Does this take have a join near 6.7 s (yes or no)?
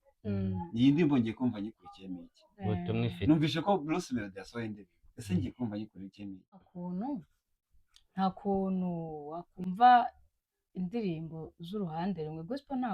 yes